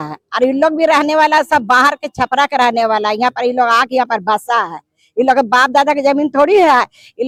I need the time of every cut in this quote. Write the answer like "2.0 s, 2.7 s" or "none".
none